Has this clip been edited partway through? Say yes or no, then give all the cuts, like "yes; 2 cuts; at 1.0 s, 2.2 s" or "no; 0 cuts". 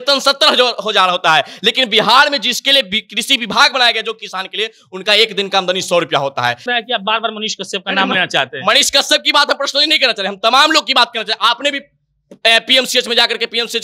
yes; 1 cut; at 6.7 s